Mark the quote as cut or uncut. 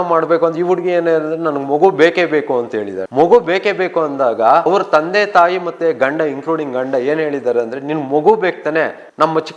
cut